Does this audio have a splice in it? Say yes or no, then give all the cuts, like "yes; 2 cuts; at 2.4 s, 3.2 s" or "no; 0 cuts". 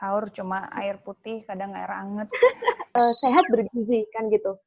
yes; 1 cut; at 2.8 s